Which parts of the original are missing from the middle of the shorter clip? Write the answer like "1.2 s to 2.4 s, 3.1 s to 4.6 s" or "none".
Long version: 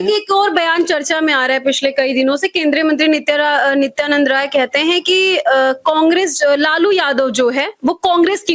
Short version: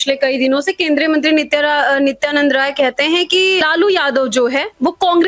5.4 s to 6.6 s